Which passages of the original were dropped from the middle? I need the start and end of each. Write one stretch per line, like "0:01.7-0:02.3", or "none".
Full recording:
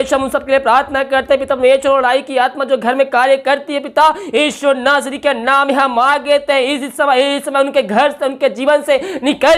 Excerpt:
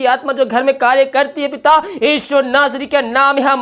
none